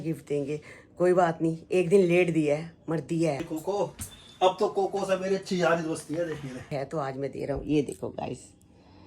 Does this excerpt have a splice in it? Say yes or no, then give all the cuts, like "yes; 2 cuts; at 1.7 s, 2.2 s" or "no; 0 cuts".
yes; 2 cuts; at 3.4 s, 6.7 s